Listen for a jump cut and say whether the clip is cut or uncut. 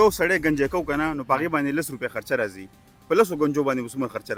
uncut